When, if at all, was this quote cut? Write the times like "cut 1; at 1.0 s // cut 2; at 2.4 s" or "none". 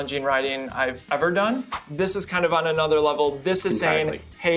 cut 1; at 1.0 s // cut 2; at 1.8 s